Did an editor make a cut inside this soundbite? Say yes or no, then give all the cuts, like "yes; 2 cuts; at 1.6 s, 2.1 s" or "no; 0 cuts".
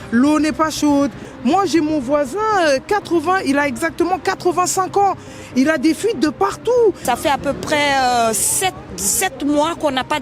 yes; 2 cuts; at 1.2 s, 7.0 s